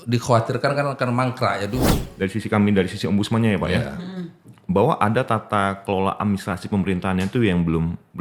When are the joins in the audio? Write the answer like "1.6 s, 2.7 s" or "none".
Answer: 2.0 s